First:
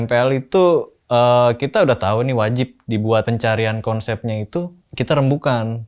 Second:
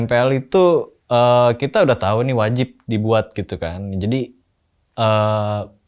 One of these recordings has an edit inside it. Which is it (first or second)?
first